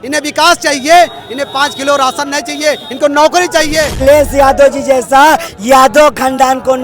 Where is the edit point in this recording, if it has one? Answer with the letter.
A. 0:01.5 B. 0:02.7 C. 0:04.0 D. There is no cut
C